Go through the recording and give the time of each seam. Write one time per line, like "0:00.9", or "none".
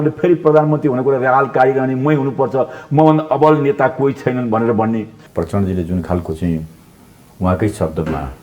0:05.2